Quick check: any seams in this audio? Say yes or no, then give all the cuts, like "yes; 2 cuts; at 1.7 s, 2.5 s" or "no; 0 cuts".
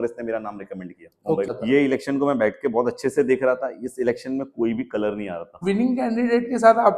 yes; 2 cuts; at 1.5 s, 5.6 s